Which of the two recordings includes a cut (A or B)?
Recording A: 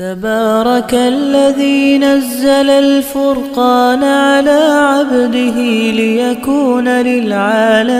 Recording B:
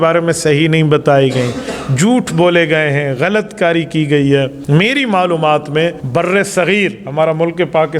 B